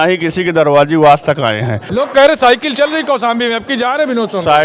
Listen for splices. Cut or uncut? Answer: cut